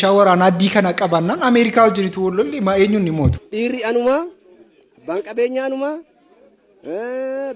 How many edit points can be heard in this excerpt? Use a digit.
0